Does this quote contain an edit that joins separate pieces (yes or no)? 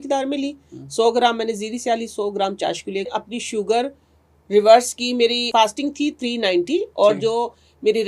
yes